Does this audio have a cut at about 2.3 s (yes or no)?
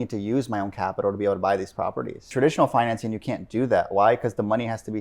yes